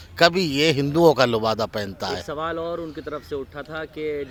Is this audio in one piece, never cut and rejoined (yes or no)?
yes